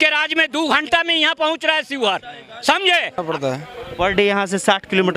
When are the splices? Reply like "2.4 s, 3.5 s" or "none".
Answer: 3.2 s